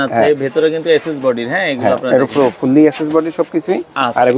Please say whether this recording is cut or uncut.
uncut